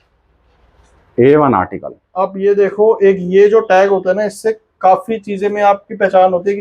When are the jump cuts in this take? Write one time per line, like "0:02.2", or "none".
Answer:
none